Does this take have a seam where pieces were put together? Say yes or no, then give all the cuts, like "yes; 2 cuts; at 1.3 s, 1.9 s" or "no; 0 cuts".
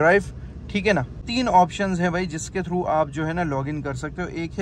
no; 0 cuts